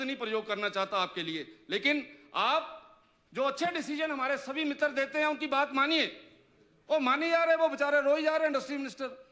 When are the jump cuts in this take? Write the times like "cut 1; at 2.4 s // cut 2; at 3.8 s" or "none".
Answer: none